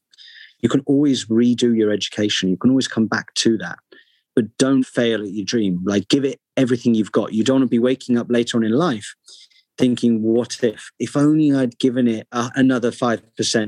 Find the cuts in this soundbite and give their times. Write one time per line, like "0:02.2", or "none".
0:04.9
0:12.4